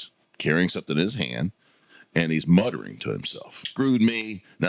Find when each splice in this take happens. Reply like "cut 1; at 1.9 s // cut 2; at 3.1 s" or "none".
cut 1; at 3.7 s